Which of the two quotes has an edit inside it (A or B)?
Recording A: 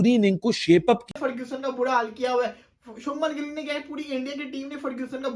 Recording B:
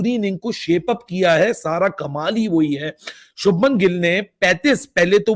A